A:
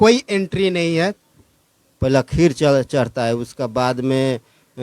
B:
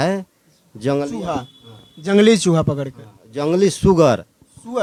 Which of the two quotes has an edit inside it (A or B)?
A